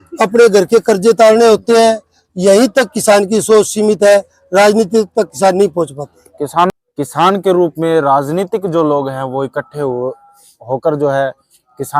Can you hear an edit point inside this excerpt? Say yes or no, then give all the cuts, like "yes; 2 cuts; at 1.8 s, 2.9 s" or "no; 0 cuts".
yes; 1 cut; at 6.7 s